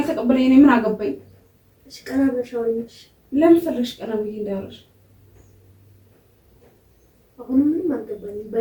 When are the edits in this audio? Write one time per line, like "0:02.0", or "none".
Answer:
none